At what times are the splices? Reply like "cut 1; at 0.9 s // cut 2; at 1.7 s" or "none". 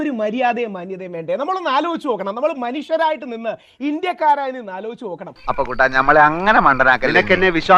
none